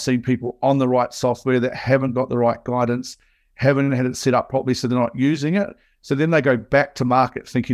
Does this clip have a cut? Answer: no; 0 cuts

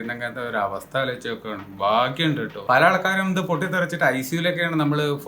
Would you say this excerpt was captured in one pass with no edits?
no; 1 cut; at 2.5 s

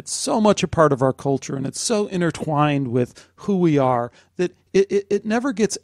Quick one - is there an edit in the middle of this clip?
no; 0 cuts

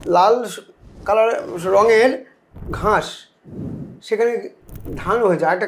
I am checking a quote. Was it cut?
no; 0 cuts

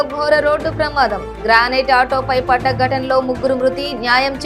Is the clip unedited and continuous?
yes; 0 cuts

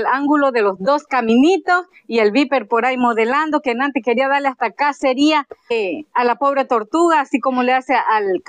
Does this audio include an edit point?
yes; 1 cut; at 5.7 s

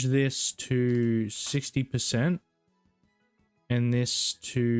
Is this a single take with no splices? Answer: yes; 0 cuts

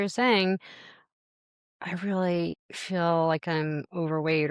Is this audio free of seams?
no; 1 cut; at 2.7 s

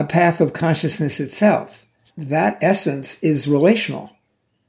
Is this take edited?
yes; 1 cut; at 2.1 s

